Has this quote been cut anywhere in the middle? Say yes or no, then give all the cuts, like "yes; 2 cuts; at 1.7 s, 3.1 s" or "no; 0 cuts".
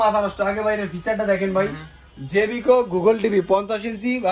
no; 0 cuts